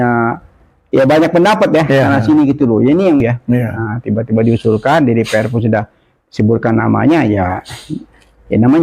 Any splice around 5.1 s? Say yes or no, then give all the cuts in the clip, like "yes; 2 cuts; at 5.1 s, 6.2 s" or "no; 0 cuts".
no; 1 cut; at 3.2 s